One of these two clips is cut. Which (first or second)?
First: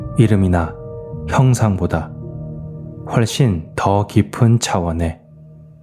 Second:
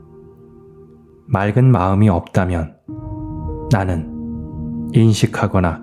second